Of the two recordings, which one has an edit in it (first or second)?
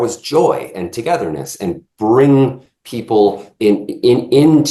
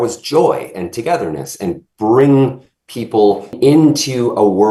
second